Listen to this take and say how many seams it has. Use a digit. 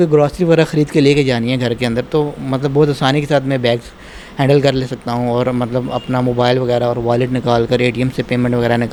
0